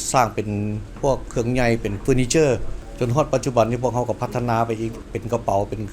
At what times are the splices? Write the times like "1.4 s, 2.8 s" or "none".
2.8 s, 5.0 s

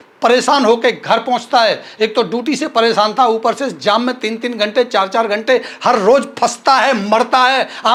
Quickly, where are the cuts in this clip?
none

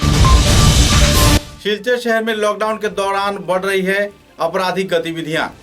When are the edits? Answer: 1.5 s

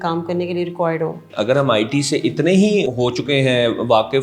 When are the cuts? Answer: 1.3 s, 2.9 s

